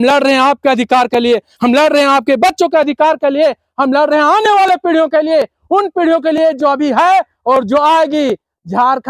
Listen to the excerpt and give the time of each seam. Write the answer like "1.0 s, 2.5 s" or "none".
none